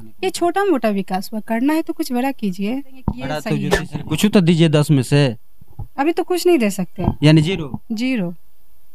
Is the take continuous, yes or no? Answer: no